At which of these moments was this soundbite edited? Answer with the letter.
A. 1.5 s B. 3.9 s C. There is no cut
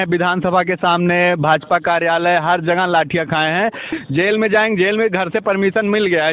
B